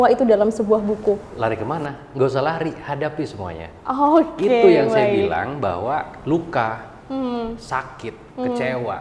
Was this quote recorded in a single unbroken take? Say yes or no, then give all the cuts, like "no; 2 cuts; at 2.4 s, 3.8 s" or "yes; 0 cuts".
no; 2 cuts; at 1.3 s, 6.1 s